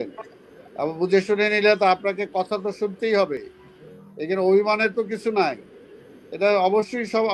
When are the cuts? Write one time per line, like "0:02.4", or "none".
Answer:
none